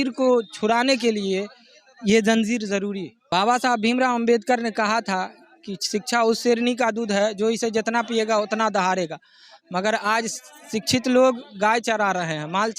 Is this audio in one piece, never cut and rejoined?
no; 1 cut; at 3.1 s

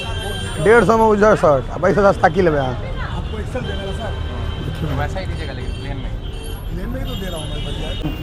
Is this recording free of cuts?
yes; 0 cuts

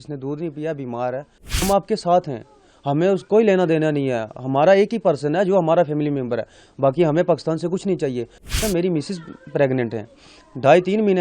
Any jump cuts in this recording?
yes; 2 cuts; at 1.6 s, 8.6 s

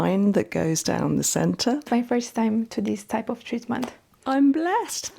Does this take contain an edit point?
yes; 2 cuts; at 1.9 s, 4.1 s

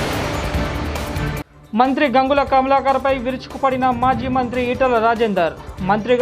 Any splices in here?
yes; 1 cut; at 1.5 s

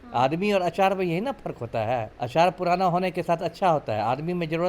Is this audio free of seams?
no; 1 cut; at 2.2 s

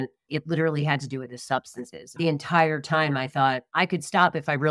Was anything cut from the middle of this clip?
yes; 1 cut; at 2.1 s

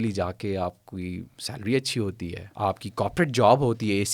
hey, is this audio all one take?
no; 1 cut; at 2.4 s

